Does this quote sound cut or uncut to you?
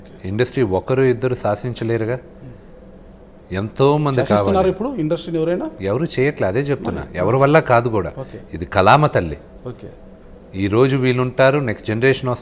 uncut